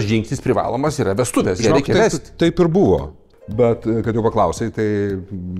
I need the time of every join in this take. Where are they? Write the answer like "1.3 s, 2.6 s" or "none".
3.2 s

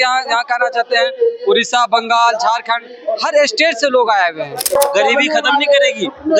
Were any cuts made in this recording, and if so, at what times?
4.8 s

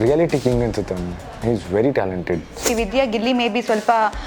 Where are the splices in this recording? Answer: 2.6 s

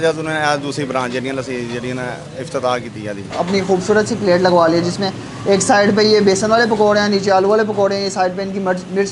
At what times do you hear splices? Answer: 3.3 s

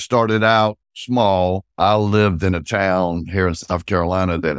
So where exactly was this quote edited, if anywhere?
0.9 s, 1.7 s

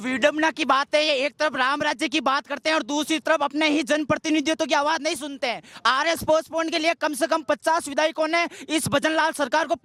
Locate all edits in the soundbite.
none

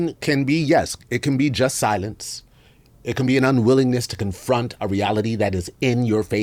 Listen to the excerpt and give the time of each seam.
none

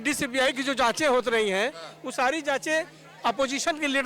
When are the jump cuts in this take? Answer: none

